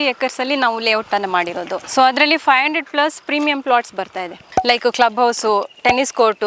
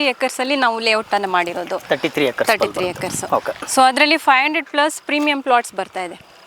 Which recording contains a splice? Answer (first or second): first